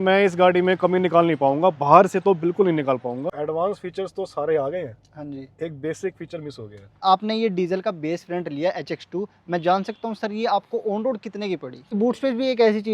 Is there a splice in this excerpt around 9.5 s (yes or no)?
no